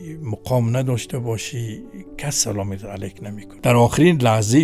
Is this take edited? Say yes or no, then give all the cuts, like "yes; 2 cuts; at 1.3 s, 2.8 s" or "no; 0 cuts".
yes; 1 cut; at 3.4 s